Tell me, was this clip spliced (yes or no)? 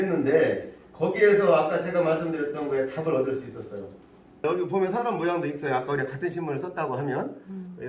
yes